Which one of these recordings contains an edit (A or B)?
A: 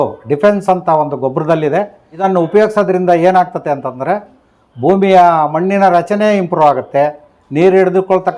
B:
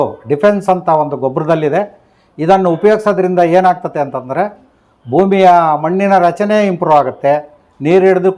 A